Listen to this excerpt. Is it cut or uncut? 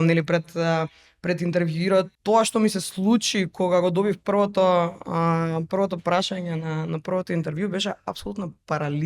cut